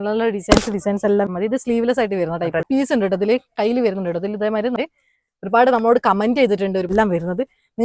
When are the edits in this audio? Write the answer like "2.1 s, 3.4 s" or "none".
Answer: 1.3 s, 2.6 s, 4.8 s, 6.9 s